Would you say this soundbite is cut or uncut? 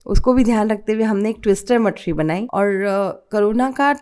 cut